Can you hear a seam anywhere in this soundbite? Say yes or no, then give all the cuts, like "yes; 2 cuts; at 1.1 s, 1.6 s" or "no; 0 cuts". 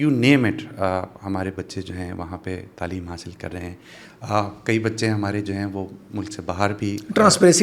no; 0 cuts